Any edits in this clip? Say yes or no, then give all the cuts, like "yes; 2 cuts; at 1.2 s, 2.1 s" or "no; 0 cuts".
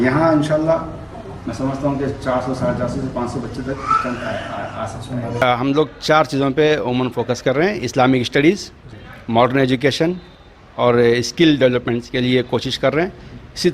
yes; 1 cut; at 5.5 s